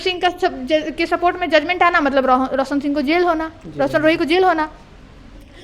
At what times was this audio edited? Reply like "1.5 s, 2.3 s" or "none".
none